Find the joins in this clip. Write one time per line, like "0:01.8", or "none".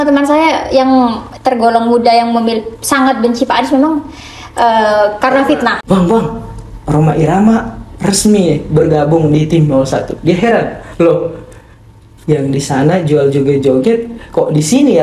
0:05.8

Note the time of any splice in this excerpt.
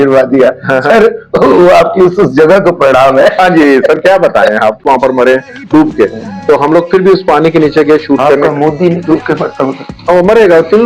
0:04.8

